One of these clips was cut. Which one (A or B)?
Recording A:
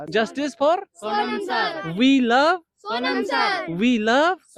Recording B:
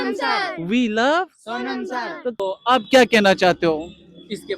B